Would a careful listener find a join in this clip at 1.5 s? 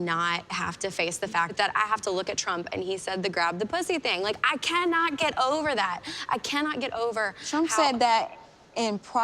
yes; 1 cut; at 1.5 s

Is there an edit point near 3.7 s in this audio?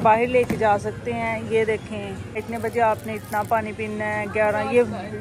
no; 1 cut; at 2.4 s

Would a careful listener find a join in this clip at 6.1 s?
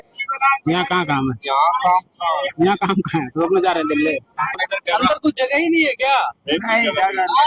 no; 1 cut; at 4.7 s

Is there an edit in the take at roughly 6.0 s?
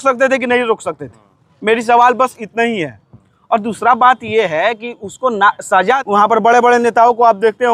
yes; 1 cut; at 6.0 s

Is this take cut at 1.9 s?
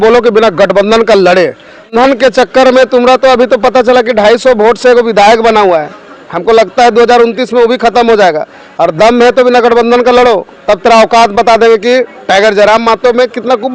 yes; 1 cut; at 1.9 s

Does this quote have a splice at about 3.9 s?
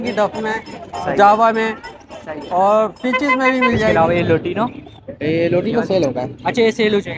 yes; 1 cut; at 3.9 s

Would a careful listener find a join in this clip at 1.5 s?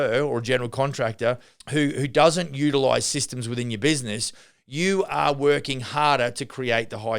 yes; 1 cut; at 1.5 s

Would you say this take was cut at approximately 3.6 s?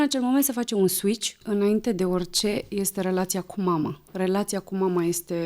no; 1 cut; at 1.4 s

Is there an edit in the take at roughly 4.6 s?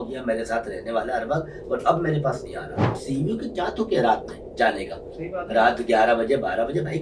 no; 1 cut; at 3.0 s

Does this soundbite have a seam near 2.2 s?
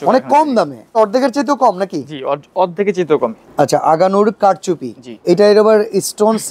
no; 3 cuts; at 1.0 s, 3.4 s, 5.2 s

